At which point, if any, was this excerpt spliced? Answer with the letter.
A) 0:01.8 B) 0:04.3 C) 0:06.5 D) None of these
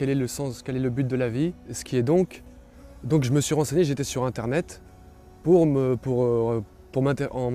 A